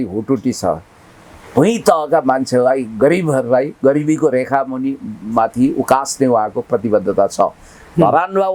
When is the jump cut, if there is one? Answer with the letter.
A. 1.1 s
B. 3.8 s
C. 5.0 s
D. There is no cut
D